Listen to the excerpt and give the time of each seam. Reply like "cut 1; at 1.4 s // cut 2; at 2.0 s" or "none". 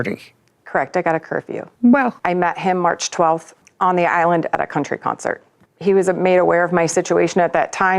cut 1; at 2.2 s